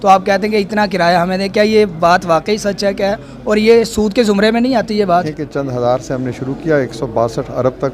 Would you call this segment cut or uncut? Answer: cut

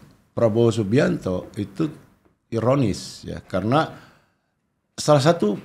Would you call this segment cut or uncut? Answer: uncut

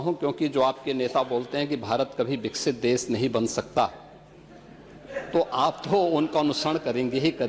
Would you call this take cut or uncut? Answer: uncut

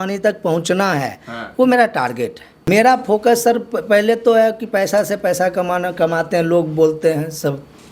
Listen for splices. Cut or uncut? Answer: cut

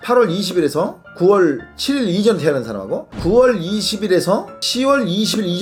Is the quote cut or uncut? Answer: uncut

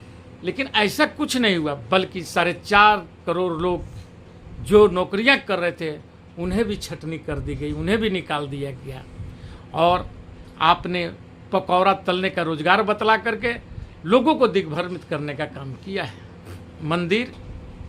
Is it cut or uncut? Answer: cut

